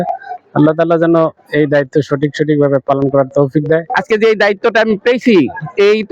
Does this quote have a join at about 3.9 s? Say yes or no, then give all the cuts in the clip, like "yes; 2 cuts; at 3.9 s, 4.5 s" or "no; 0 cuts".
yes; 1 cut; at 3.9 s